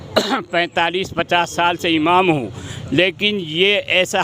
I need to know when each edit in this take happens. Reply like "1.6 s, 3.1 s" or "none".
none